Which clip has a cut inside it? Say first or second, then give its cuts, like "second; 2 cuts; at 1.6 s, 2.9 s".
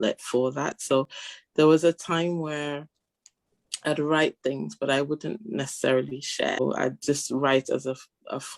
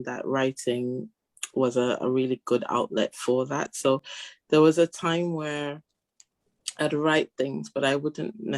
first; 1 cut; at 6.6 s